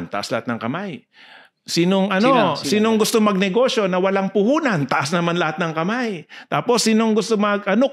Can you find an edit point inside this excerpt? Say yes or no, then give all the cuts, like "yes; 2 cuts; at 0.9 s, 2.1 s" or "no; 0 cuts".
no; 0 cuts